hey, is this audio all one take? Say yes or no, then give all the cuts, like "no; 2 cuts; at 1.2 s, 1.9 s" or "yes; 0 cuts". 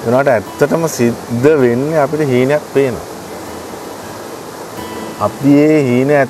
yes; 0 cuts